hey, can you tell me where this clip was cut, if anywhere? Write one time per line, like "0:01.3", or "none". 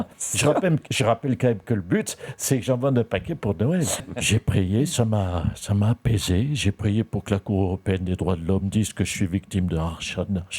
0:04.0